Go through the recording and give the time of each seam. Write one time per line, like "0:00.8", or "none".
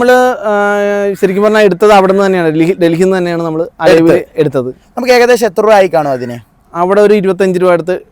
none